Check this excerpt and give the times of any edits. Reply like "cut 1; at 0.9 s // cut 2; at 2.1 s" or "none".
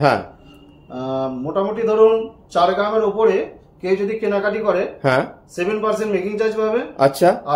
none

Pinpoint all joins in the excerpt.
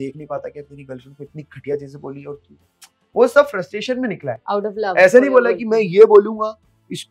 none

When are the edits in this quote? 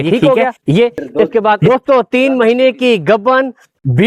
cut 1; at 1.6 s

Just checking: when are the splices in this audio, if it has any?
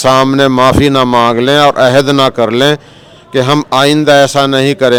none

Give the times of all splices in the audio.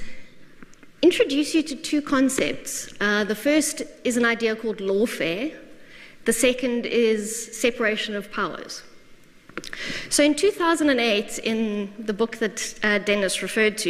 none

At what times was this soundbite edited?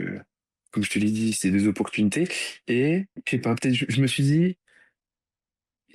cut 1; at 3.2 s

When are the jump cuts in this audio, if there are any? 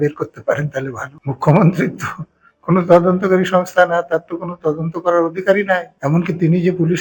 cut 1; at 1.1 s // cut 2; at 5.9 s

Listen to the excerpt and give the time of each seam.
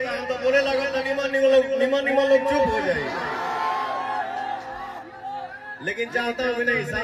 none

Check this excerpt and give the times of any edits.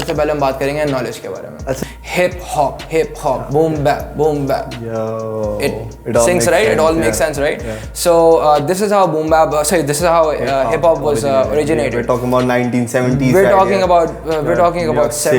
cut 1; at 1.8 s

